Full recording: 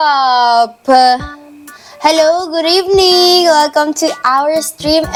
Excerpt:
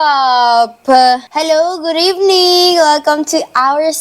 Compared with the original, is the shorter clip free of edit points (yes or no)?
no